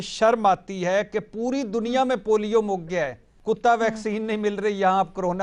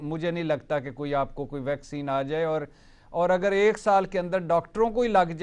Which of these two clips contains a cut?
first; 1 cut; at 3.3 s

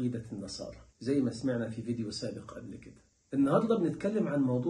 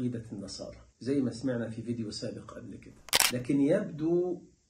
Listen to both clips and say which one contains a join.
second; 1 cut; at 3.1 s

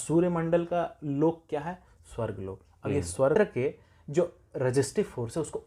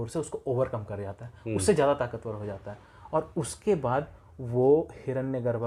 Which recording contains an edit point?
first; 1 cut; at 3.3 s

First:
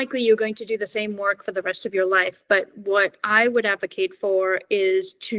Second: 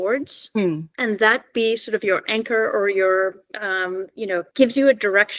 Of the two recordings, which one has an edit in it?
second; 2 cuts; at 0.9 s, 4.5 s

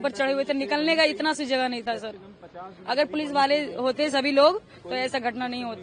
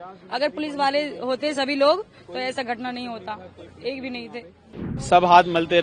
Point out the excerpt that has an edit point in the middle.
second; 1 cut; at 4.9 s

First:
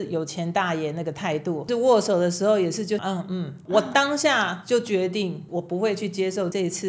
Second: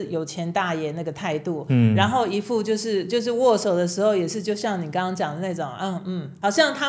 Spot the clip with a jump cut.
first; 2 cuts; at 1.7 s, 3.4 s

